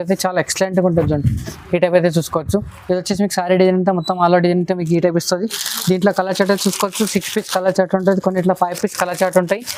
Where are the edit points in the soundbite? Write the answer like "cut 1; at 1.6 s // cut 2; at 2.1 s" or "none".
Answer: none